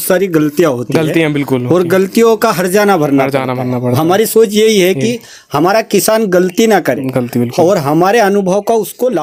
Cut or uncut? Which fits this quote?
uncut